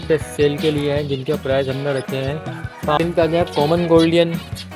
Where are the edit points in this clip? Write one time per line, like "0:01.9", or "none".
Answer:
0:03.0